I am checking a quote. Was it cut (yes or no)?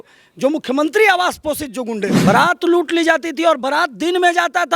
yes